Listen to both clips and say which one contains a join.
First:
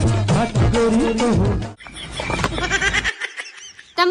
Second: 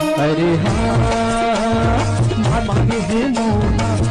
first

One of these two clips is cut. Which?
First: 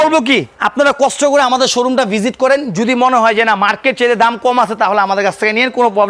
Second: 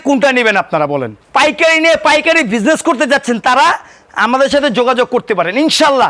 second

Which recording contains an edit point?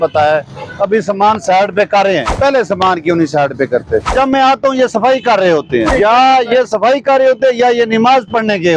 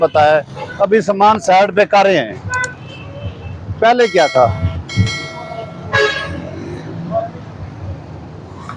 first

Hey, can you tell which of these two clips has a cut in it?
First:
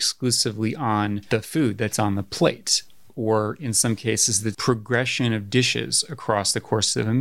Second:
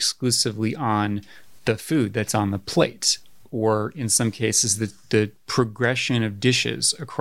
first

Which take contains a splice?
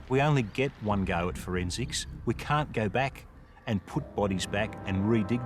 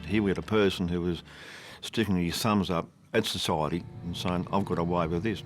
second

